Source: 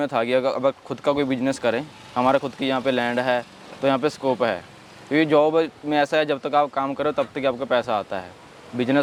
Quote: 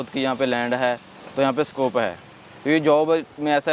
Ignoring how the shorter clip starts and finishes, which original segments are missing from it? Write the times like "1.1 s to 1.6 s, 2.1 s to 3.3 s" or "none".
none